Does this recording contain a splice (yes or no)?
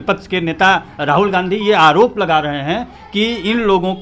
no